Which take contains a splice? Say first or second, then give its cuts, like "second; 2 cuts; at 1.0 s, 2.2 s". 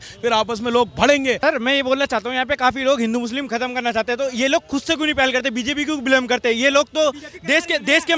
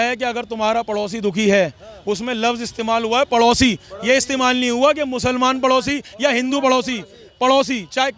first; 1 cut; at 1.4 s